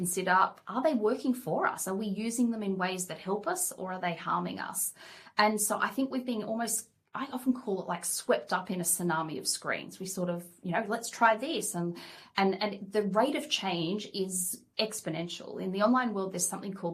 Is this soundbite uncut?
yes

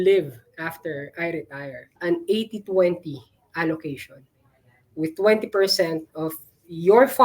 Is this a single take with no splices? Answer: no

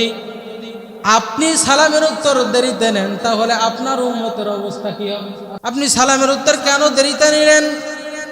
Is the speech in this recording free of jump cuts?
no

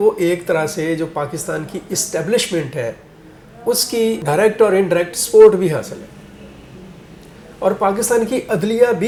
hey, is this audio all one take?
yes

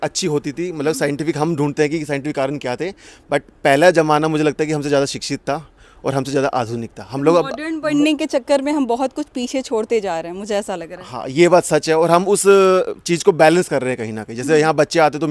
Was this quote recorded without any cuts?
yes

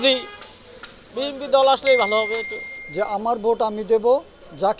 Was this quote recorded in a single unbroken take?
no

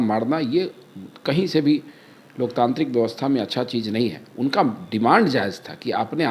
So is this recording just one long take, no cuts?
yes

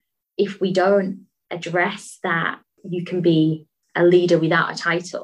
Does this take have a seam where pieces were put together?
yes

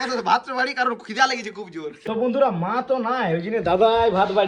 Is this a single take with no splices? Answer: no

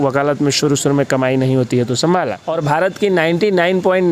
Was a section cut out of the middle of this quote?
yes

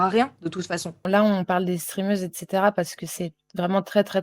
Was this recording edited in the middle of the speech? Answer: yes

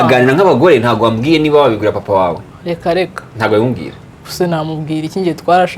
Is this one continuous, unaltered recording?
no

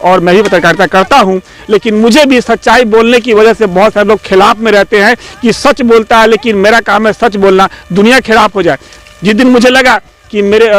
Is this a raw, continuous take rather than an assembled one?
yes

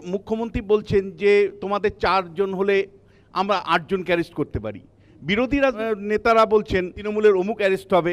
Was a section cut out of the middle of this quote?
yes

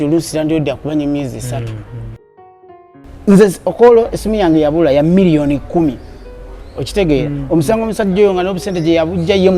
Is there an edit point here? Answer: yes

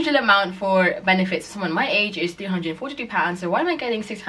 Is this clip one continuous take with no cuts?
yes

